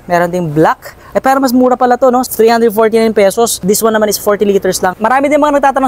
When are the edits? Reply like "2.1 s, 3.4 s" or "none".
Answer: 2.3 s, 3.6 s, 5.0 s